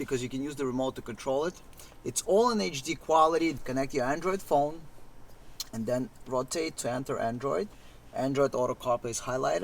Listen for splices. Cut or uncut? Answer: cut